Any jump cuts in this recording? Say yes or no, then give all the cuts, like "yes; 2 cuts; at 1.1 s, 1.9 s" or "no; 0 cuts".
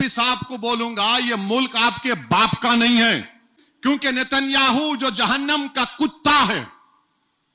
no; 0 cuts